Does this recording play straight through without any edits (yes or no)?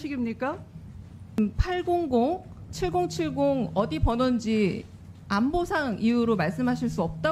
no